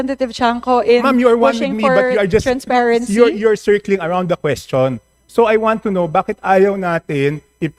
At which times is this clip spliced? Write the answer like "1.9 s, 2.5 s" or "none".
none